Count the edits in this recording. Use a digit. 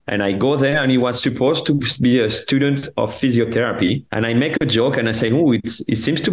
1